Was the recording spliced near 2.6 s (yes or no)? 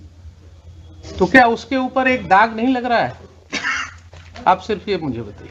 no